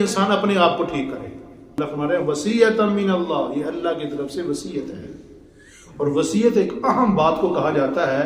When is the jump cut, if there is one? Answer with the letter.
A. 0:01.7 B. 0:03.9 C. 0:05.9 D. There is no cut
A